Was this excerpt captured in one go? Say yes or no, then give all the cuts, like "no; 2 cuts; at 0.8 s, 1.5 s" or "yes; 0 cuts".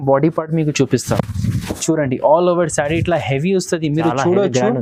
yes; 0 cuts